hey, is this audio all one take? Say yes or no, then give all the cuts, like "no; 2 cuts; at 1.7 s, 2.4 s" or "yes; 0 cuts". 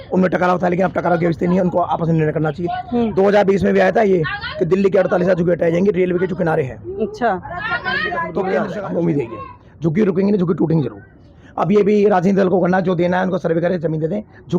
no; 1 cut; at 8.5 s